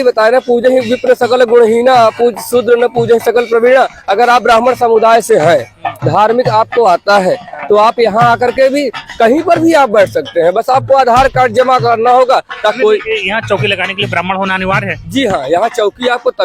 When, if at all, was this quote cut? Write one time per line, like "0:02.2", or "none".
0:12.8